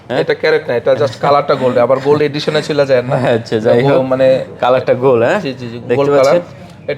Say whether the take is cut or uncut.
uncut